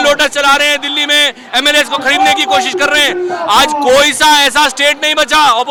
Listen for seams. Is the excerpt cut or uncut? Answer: uncut